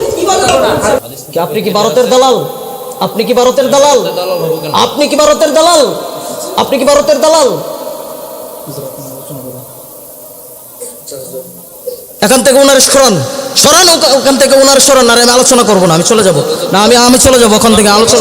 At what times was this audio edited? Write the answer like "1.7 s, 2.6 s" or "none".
1.0 s